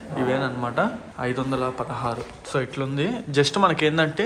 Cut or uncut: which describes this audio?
uncut